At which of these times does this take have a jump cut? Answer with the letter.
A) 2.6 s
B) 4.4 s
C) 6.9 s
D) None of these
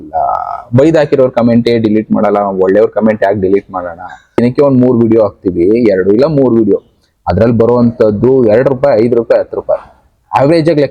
B